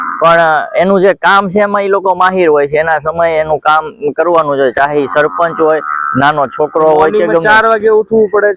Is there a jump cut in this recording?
no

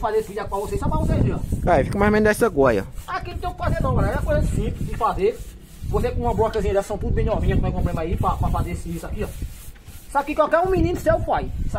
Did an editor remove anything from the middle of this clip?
no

